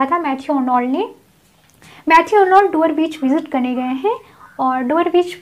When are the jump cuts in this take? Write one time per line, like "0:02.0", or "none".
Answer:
none